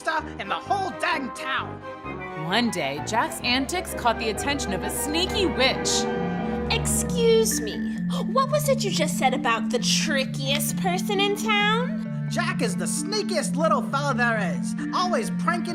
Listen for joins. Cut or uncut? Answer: uncut